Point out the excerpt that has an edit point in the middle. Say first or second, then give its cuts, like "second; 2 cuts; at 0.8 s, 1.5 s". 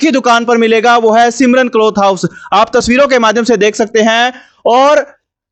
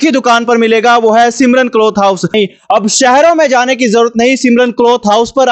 second; 1 cut; at 2.3 s